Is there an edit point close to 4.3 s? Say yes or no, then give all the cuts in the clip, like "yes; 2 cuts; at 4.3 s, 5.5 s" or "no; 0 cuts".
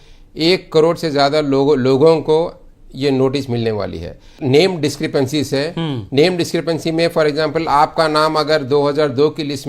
yes; 1 cut; at 4.3 s